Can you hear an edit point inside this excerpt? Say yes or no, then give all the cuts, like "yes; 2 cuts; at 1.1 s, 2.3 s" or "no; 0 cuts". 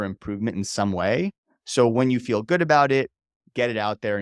no; 0 cuts